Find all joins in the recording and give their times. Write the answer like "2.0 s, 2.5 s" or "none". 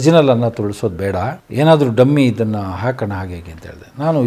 1.4 s